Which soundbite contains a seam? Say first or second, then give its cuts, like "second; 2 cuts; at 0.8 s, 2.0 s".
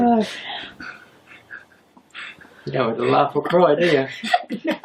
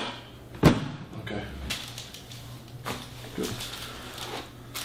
first; 1 cut; at 1.3 s